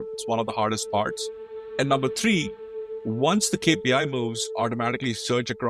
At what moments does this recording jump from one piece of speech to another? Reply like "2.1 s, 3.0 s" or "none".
1.3 s